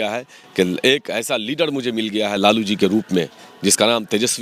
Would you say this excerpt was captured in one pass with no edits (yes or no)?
yes